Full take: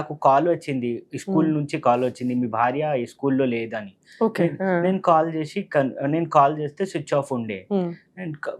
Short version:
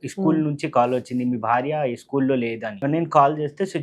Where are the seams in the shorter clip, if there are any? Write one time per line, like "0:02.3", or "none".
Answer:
0:02.8